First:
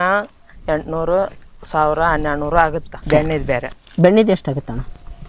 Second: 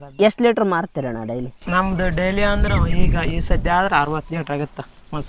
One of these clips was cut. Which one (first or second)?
first